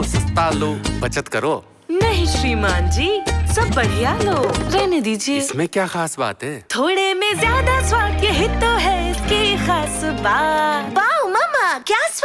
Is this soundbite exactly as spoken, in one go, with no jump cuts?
yes; 0 cuts

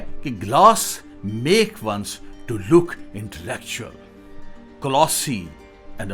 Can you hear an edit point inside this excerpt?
no; 0 cuts

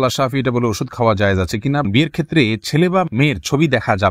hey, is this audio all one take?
no; 1 cut; at 1.8 s

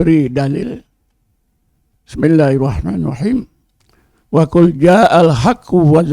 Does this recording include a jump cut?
no; 0 cuts

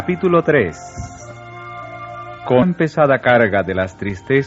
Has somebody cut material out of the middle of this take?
no; 0 cuts

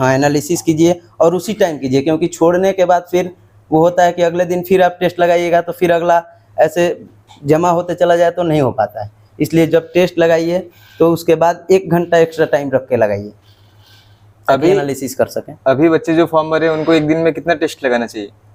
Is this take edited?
no; 0 cuts

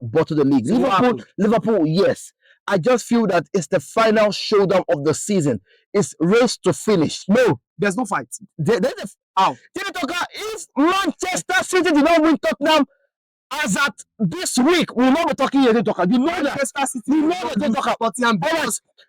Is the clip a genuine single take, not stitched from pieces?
no; 1 cut; at 7.2 s

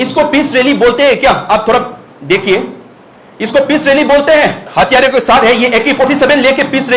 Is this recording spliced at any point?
yes; 1 cut; at 4.6 s

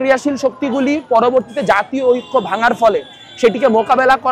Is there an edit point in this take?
no; 0 cuts

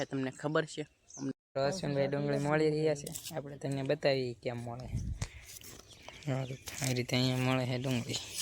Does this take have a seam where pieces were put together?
yes; 1 cut; at 1.4 s

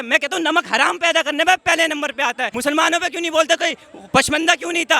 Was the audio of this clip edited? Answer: yes; 1 cut; at 2.5 s

